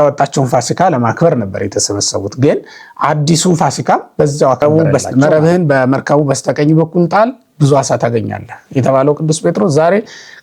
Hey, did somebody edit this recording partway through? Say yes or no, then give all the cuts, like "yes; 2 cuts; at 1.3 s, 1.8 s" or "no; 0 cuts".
yes; 1 cut; at 4.6 s